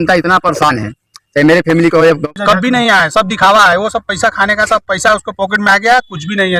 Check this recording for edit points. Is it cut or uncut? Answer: cut